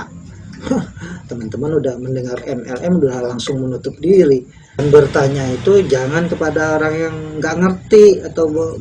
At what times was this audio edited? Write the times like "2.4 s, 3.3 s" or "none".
4.8 s